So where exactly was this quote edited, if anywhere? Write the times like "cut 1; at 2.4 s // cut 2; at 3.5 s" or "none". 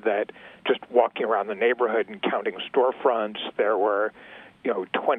none